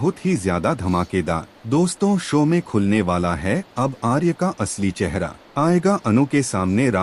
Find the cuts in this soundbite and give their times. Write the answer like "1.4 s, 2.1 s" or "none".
1.5 s, 5.4 s